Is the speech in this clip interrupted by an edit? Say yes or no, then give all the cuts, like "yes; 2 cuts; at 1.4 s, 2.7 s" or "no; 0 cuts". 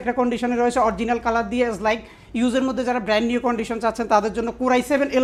no; 0 cuts